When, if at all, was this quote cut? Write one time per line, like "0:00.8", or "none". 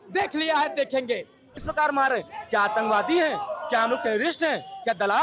0:01.6